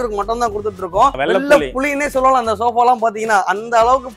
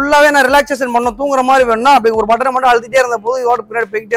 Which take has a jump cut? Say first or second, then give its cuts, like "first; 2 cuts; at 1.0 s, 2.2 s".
first; 1 cut; at 1.2 s